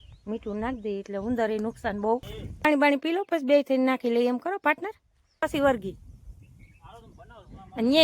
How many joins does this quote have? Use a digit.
2